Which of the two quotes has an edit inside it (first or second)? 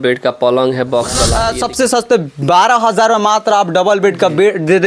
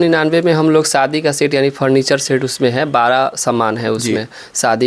first